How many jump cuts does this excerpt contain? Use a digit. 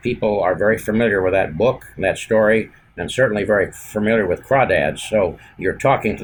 0